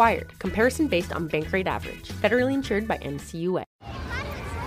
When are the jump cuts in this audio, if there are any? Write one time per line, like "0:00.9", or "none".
0:03.7